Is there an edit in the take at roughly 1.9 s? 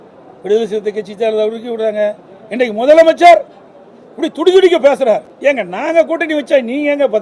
no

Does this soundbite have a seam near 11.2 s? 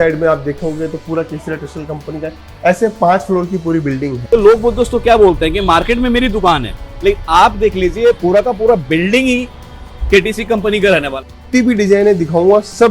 yes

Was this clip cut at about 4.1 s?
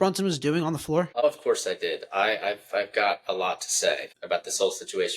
yes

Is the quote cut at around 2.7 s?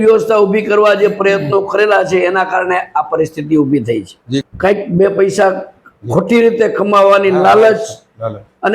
no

